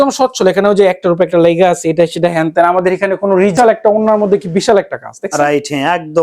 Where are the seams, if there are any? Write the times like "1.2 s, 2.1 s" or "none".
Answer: 3.5 s